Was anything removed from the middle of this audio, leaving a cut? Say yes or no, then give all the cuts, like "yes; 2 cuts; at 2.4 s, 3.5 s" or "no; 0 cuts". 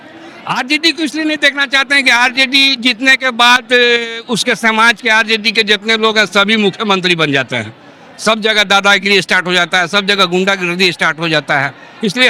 no; 0 cuts